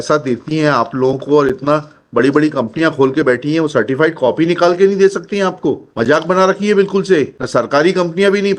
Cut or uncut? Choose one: cut